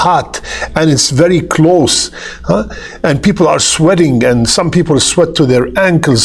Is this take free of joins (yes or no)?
yes